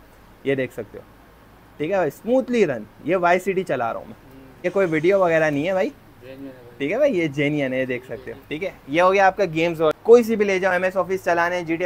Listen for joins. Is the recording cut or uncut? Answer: cut